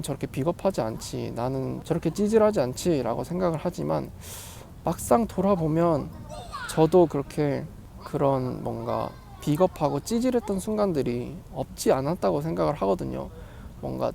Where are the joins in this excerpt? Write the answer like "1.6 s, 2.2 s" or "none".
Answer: none